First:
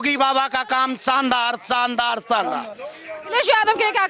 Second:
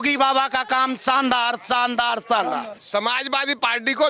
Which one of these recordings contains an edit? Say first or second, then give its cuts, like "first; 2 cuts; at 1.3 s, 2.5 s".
second; 1 cut; at 2.7 s